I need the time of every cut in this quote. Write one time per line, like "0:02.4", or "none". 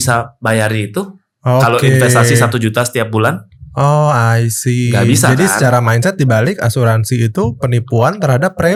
none